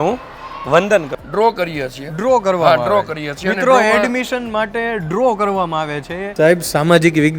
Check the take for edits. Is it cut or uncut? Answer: cut